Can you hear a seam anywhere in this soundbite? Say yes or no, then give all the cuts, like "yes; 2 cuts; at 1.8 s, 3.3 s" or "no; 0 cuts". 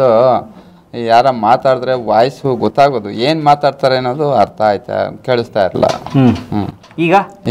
no; 0 cuts